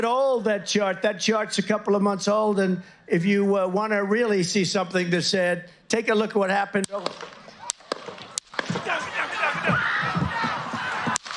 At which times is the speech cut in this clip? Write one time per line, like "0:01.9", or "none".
none